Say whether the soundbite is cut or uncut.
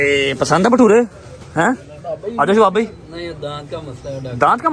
uncut